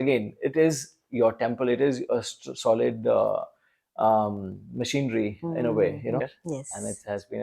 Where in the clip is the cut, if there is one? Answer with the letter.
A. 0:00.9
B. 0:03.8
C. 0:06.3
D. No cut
C